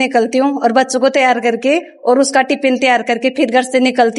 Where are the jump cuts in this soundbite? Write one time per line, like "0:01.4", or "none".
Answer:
none